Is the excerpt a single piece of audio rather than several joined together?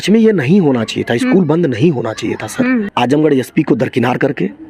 no; 1 cut; at 2.9 s

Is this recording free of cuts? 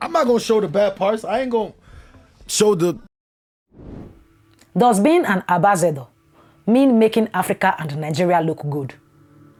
yes; 0 cuts

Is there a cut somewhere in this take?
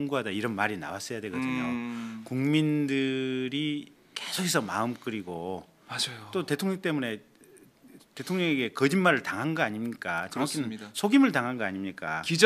yes; 1 cut; at 1.9 s

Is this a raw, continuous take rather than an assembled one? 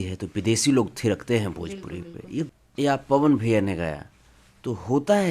no; 1 cut; at 2.5 s

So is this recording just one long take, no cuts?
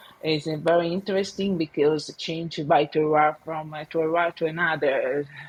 yes; 0 cuts

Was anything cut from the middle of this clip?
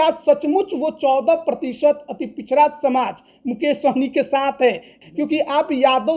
yes; 1 cut; at 4.9 s

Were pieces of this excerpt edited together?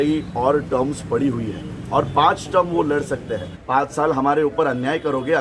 yes; 1 cut; at 3.6 s

